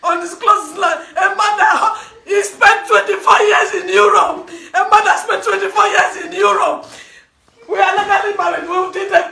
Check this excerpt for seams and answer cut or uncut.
uncut